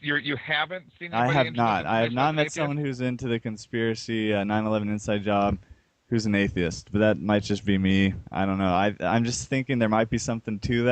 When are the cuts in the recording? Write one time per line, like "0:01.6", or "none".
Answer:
0:00.9

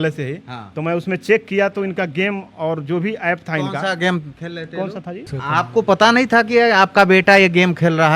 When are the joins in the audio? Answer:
0:05.4

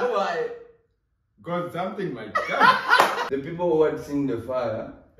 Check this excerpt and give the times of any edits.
0:03.2

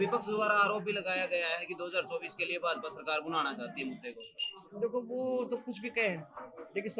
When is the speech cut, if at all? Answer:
none

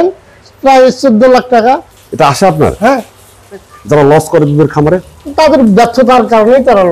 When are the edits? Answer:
0:03.7

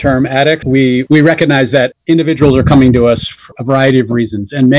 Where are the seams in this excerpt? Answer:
0:01.0

